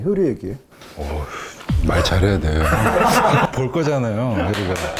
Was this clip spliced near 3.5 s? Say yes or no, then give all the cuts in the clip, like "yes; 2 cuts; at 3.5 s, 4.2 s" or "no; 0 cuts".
yes; 1 cut; at 3.5 s